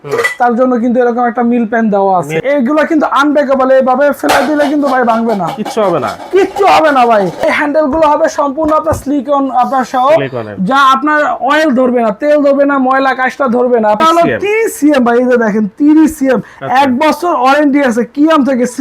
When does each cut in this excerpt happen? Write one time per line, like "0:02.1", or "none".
0:02.4
0:07.4
0:14.0